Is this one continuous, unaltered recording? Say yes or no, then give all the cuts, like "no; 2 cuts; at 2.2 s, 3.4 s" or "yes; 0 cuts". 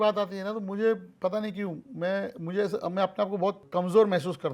no; 1 cut; at 3.6 s